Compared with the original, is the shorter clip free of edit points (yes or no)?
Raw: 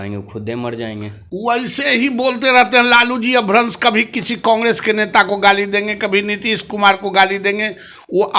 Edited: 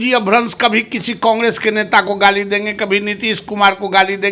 yes